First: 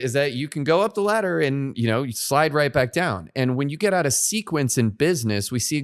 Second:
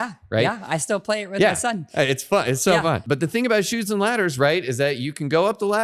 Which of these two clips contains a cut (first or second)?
second